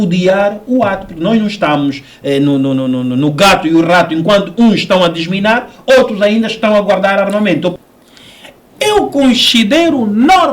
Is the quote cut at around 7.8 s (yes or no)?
yes